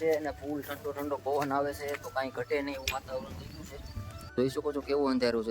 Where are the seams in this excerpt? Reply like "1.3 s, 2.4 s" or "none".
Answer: 4.4 s

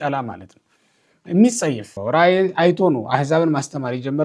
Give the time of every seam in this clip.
1.9 s

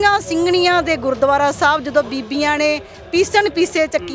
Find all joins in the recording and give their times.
none

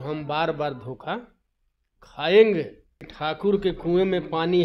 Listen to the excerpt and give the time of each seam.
3.1 s

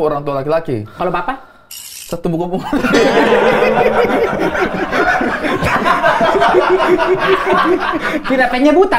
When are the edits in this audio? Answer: none

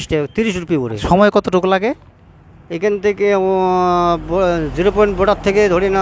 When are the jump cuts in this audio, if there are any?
1.0 s

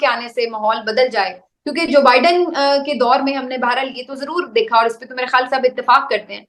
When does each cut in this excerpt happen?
none

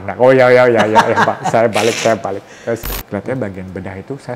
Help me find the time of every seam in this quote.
2.9 s

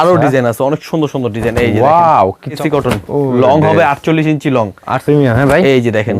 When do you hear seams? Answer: 2.6 s, 5.0 s

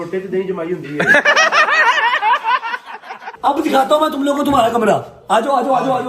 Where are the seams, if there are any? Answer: 1.4 s, 3.3 s

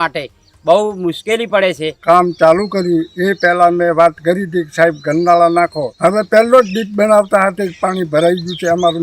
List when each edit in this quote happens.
2.0 s, 5.8 s

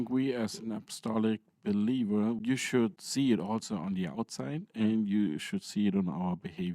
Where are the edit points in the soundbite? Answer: 2.5 s

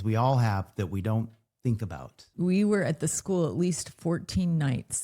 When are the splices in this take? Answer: 2.2 s

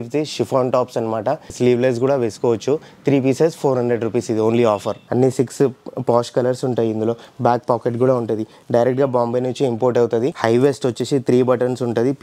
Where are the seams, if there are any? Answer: 5.0 s, 10.4 s

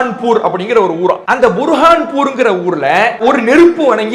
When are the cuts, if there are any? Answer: 1.2 s, 3.1 s

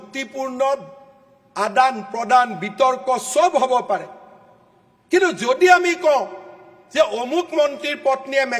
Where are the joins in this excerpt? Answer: none

